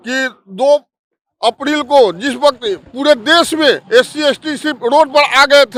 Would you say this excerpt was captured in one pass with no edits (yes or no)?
yes